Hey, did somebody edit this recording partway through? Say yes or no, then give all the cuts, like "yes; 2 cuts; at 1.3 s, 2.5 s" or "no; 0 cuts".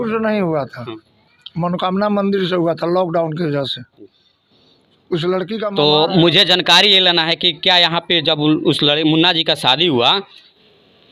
no; 0 cuts